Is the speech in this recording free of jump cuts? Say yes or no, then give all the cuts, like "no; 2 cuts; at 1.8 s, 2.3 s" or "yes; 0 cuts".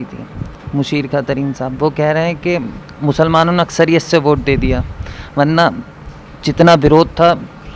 yes; 0 cuts